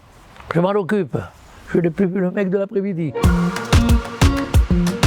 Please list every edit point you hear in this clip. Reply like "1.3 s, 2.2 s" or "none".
3.2 s